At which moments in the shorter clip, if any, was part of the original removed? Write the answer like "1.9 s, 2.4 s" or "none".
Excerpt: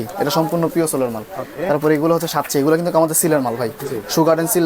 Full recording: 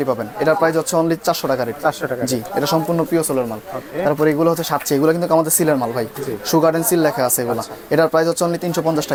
none